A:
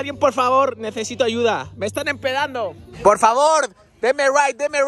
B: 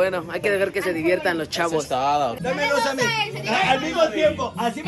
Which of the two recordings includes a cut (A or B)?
B